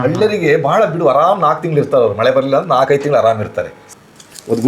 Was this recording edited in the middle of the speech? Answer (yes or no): yes